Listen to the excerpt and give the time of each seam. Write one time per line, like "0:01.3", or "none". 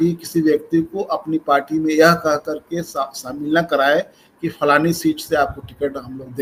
none